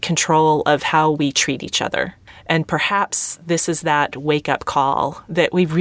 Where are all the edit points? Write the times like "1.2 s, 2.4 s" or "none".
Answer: 2.3 s